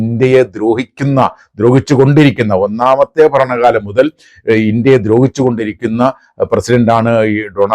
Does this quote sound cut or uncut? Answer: uncut